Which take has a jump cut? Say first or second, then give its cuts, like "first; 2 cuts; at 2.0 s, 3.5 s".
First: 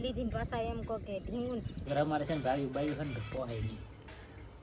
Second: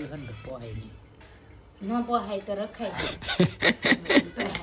first; 1 cut; at 1.8 s